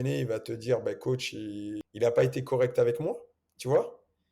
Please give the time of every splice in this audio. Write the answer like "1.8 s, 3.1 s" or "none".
1.8 s